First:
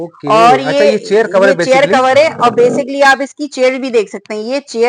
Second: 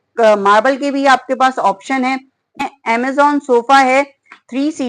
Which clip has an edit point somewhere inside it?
second; 1 cut; at 2.7 s

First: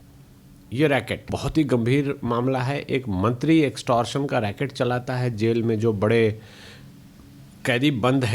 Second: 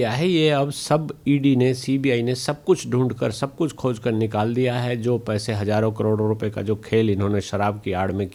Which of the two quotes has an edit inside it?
first; 1 cut; at 1.4 s

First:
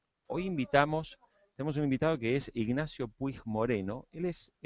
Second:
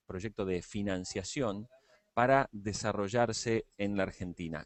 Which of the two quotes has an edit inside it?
first; 1 cut; at 2.5 s

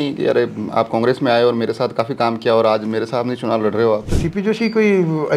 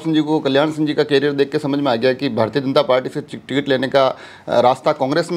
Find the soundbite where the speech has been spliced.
first; 1 cut; at 4.2 s

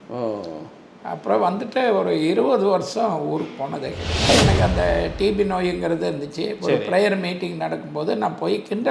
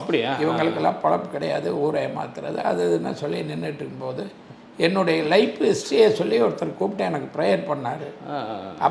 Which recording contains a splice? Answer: first; 1 cut; at 4.3 s

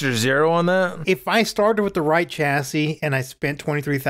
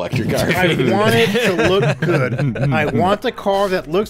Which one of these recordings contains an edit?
first; 1 cut; at 1.0 s

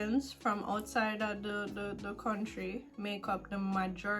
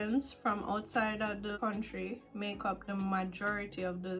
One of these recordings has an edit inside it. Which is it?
second; 1 cut; at 1.6 s

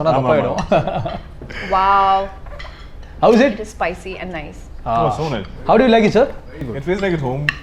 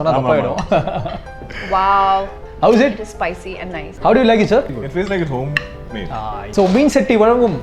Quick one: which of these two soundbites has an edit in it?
second; 4 cuts; at 2.4 s, 3.8 s, 4.8 s, 6.4 s

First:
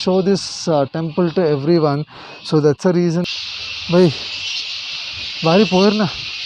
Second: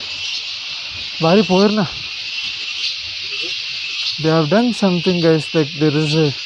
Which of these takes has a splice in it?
first; 1 cut; at 3.3 s

